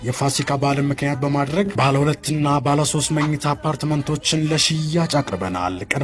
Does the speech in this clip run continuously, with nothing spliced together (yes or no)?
yes